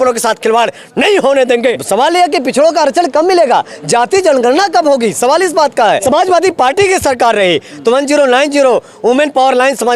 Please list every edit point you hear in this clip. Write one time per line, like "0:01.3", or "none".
0:01.8
0:06.0